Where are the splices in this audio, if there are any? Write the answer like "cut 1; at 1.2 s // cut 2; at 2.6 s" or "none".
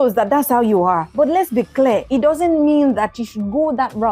cut 1; at 1.1 s // cut 2; at 2.0 s